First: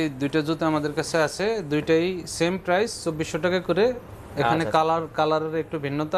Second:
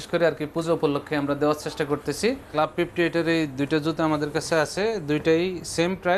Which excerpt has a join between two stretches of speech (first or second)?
second